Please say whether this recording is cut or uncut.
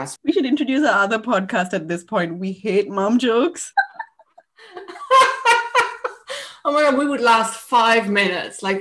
uncut